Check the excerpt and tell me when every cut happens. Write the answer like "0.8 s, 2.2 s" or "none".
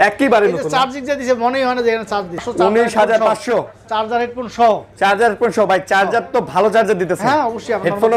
2.5 s